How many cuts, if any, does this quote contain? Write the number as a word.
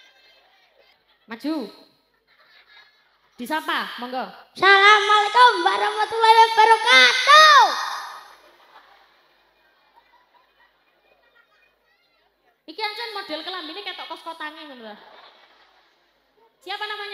one